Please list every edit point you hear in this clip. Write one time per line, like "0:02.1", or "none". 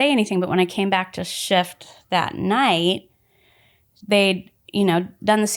none